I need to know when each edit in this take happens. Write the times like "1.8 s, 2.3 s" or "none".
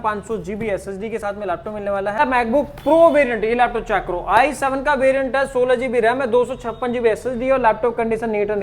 2.2 s